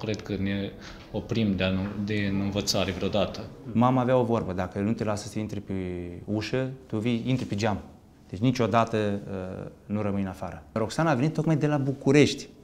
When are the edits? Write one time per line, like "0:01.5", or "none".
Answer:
0:03.6
0:10.8